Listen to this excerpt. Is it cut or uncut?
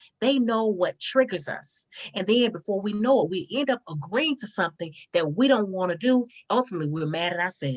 cut